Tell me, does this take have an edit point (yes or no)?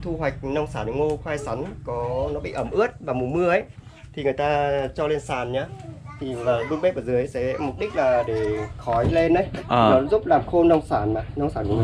no